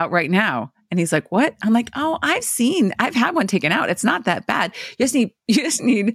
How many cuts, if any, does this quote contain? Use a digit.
0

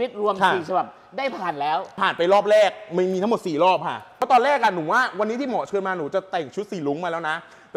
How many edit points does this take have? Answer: 2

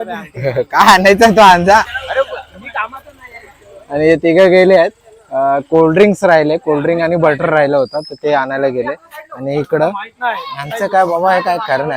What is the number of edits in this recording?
0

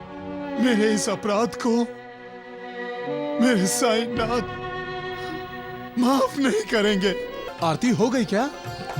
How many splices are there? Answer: 1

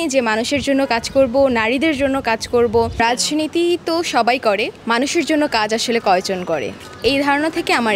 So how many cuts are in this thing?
2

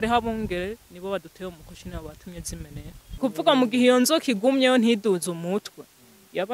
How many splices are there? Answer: 1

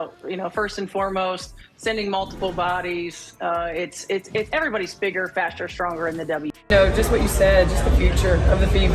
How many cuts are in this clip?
1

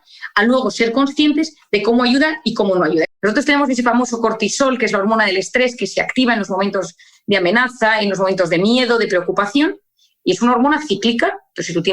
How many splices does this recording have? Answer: 1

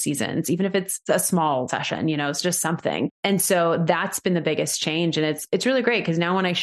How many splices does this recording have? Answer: 3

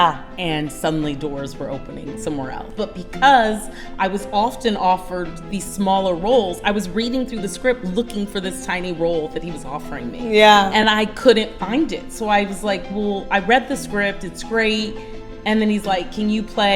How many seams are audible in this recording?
1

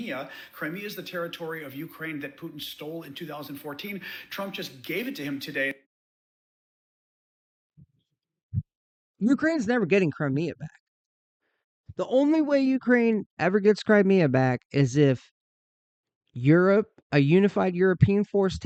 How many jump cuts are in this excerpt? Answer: 0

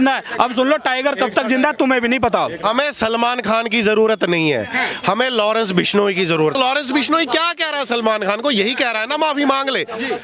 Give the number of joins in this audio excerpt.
2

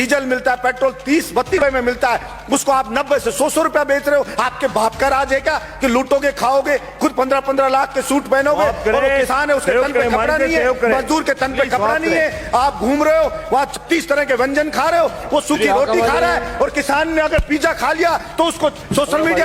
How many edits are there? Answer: 1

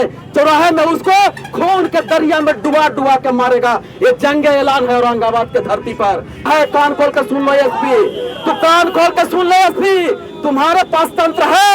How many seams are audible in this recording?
1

